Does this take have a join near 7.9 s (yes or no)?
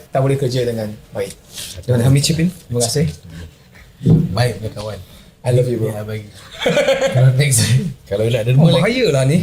yes